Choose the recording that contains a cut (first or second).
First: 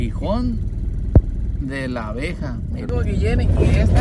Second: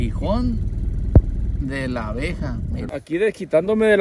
second